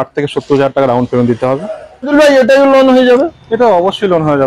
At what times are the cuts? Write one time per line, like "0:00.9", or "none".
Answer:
0:02.1